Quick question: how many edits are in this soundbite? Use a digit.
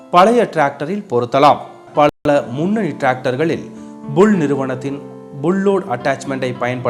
1